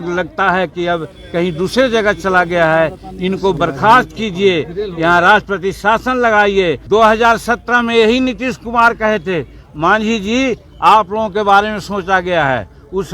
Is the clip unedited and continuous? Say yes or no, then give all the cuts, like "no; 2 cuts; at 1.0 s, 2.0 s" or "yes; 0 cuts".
no; 1 cut; at 6.8 s